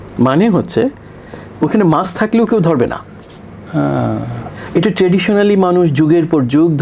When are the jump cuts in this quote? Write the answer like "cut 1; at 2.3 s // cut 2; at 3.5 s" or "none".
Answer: none